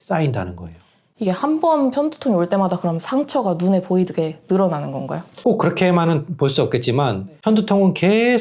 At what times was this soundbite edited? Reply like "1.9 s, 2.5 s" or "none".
none